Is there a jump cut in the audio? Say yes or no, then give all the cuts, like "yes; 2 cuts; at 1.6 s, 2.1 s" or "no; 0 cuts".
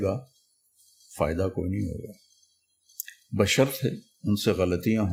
no; 0 cuts